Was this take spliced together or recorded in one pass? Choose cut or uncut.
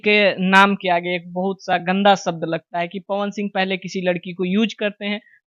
uncut